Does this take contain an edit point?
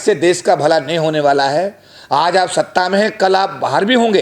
no; 0 cuts

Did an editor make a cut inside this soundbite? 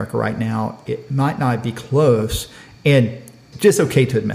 yes; 1 cut; at 3.4 s

